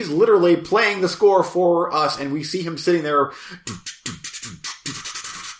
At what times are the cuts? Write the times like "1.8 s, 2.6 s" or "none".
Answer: none